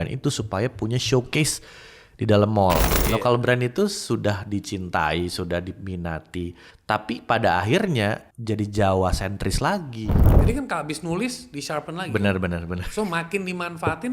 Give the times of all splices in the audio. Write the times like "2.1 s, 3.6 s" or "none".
2.9 s, 6.7 s, 8.3 s, 10.2 s

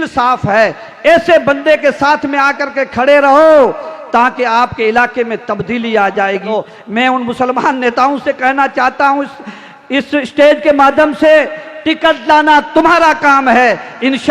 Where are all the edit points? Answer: 6.4 s

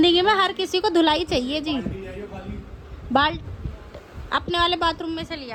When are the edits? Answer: none

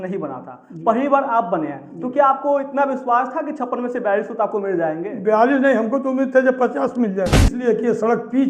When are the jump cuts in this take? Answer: 7.5 s

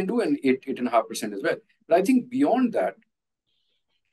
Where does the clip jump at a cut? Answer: none

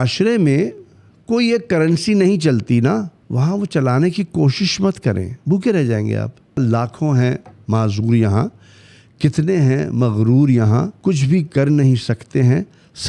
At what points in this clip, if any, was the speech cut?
3.2 s, 5.3 s, 6.6 s, 10.9 s

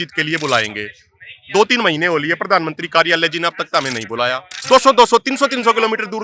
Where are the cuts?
4.5 s

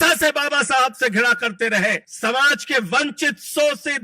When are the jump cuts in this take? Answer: 2.1 s

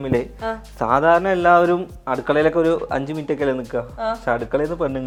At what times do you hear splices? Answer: none

